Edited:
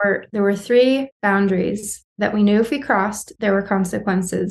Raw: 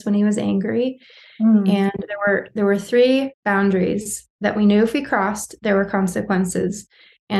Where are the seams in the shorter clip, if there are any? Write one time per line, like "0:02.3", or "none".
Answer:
none